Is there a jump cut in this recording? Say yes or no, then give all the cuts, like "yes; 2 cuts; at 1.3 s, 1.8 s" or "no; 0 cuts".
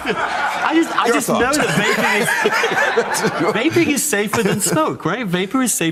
no; 0 cuts